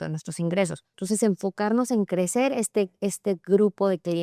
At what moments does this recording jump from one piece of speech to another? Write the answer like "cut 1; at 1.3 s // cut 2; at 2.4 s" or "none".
cut 1; at 1.0 s